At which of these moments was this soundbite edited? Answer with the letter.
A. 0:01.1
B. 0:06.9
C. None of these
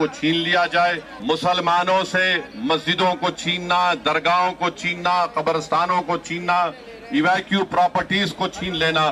A